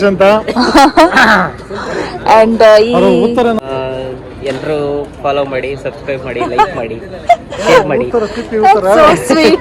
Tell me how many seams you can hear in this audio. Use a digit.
1